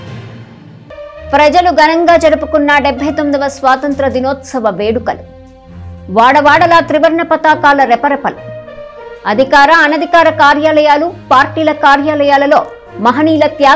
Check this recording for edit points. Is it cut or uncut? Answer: uncut